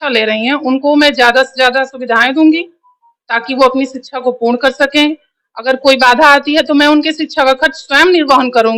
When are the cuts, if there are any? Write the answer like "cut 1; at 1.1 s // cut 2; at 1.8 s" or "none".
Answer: none